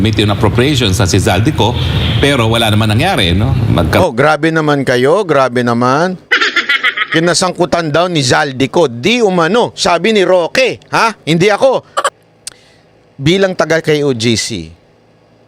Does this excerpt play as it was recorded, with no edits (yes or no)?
no